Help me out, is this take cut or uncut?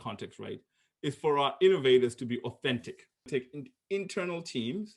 cut